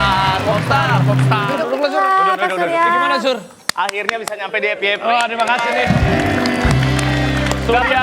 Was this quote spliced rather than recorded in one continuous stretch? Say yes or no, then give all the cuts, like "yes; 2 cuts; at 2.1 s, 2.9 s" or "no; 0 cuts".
no; 0 cuts